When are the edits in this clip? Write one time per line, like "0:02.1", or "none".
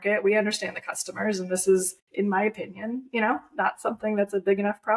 0:02.0